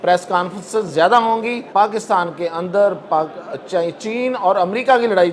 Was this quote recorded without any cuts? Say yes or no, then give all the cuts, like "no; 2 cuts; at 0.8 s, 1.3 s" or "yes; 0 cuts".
no; 1 cut; at 1.7 s